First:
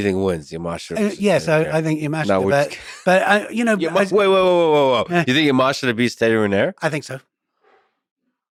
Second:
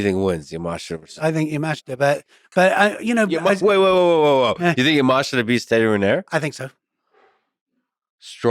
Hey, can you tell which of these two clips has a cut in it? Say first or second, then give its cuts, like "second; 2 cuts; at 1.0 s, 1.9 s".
second; 1 cut; at 0.9 s